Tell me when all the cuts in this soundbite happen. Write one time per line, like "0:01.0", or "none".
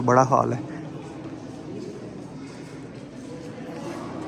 none